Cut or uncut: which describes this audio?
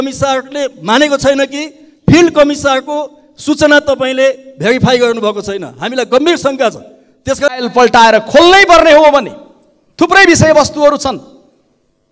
cut